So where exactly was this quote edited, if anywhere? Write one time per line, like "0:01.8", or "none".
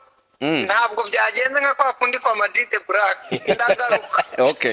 0:03.3